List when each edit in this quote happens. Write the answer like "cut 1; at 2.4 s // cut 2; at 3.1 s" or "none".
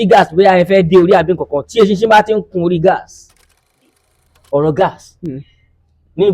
cut 1; at 3.8 s

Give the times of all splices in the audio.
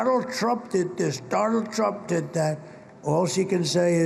none

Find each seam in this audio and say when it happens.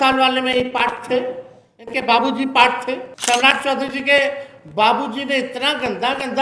cut 1; at 3.1 s

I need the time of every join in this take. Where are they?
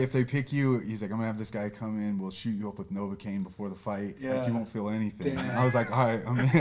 none

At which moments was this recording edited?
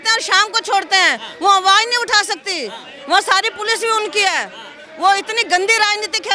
none

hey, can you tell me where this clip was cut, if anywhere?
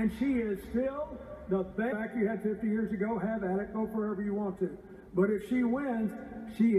none

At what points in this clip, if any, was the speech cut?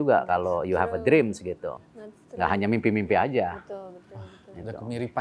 none

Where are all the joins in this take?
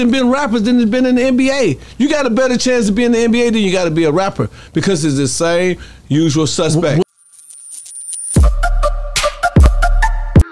cut 1; at 7.0 s

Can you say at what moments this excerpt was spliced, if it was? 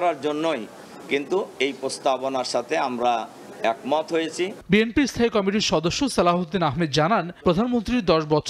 none

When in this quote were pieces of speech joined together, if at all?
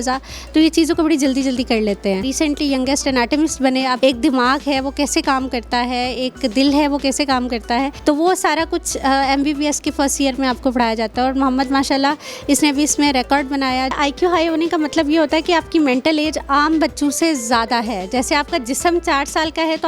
cut 1; at 2.3 s // cut 2; at 3.9 s // cut 3; at 7.9 s // cut 4; at 13.9 s

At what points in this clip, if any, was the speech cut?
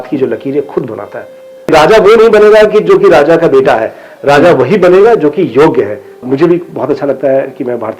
cut 1; at 1.6 s // cut 2; at 6.2 s

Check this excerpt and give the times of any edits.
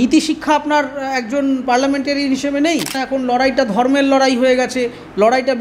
cut 1; at 3.0 s

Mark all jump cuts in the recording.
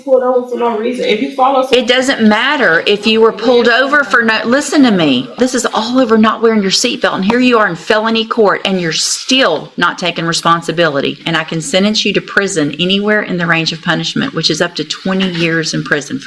cut 1; at 5.3 s // cut 2; at 11.2 s

